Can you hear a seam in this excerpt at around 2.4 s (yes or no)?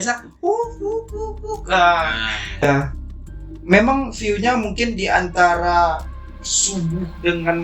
yes